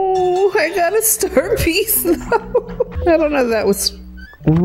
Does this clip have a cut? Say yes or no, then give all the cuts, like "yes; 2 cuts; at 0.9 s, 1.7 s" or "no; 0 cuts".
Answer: yes; 1 cut; at 2.9 s